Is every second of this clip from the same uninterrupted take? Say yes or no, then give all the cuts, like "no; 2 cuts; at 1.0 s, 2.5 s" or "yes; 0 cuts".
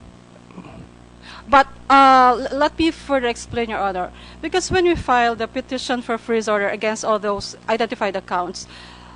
yes; 0 cuts